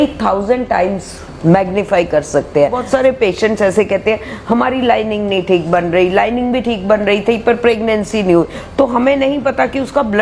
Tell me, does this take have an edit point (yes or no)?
yes